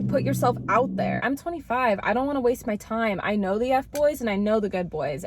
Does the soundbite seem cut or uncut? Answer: cut